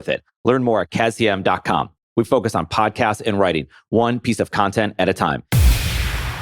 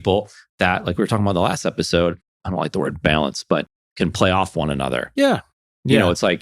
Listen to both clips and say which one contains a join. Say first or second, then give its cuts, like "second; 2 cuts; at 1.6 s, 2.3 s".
first; 1 cut; at 5.5 s